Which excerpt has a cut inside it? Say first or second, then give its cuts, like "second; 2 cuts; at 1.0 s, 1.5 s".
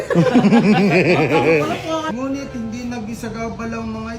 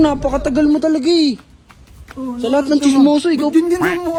first; 1 cut; at 2.1 s